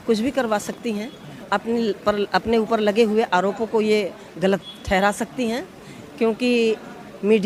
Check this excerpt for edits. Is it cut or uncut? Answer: uncut